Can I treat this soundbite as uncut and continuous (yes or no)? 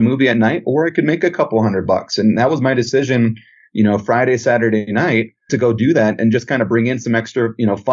no